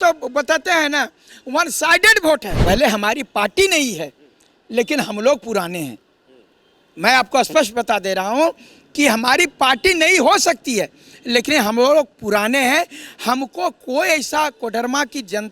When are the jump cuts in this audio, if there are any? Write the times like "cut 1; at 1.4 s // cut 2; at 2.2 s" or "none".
cut 1; at 2.5 s